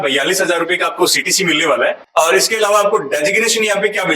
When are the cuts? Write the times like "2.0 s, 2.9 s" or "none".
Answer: 2.0 s